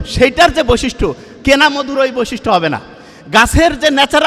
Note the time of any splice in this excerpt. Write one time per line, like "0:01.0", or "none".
none